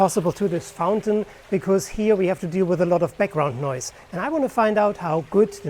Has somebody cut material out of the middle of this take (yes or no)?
no